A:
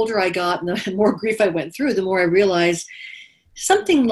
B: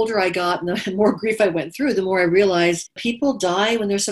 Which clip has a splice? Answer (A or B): B